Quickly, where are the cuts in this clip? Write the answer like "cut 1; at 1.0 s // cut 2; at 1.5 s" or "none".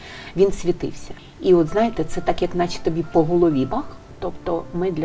cut 1; at 1.1 s // cut 2; at 4.1 s